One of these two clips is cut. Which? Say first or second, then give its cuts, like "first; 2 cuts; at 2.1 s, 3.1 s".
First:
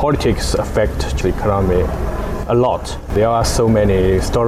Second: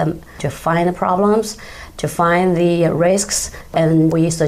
first; 1 cut; at 3.0 s